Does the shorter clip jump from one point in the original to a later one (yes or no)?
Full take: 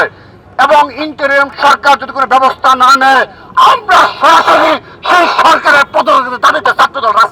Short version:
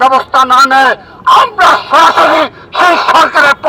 no